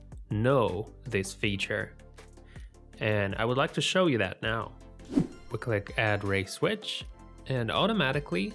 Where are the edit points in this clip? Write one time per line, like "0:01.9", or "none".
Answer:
0:05.4